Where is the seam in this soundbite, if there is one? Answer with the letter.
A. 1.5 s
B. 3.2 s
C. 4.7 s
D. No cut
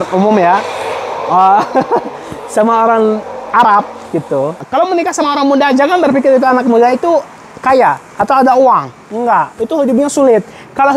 C